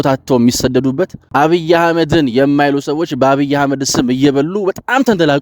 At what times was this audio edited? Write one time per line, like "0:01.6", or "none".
0:01.2